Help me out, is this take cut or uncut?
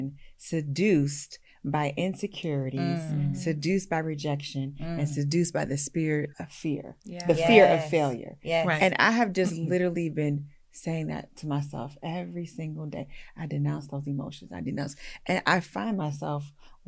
cut